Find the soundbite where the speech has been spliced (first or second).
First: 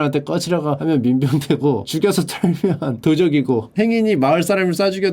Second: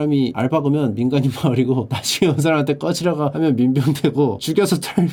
first